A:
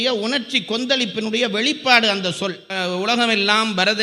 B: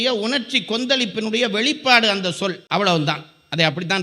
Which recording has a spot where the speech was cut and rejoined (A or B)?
A